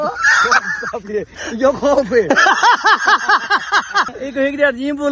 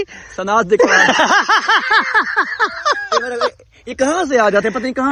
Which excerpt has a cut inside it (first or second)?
first